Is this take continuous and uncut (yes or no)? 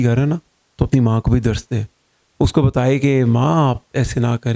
yes